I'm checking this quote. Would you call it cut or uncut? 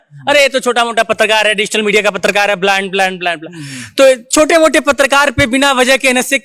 uncut